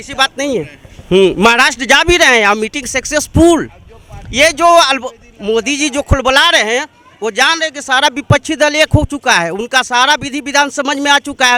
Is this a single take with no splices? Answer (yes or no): yes